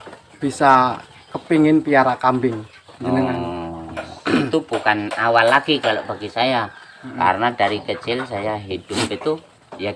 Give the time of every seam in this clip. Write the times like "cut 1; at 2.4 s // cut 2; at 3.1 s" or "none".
none